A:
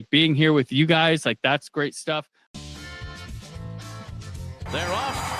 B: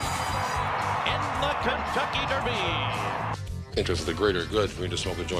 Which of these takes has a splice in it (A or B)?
A